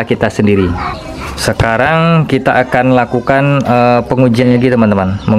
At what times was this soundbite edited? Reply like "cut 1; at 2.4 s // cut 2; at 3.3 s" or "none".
cut 1; at 1.0 s